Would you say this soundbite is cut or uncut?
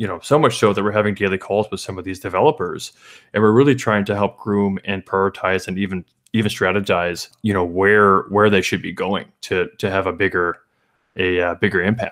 uncut